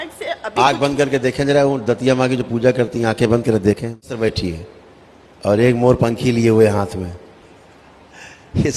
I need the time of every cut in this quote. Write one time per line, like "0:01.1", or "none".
0:04.2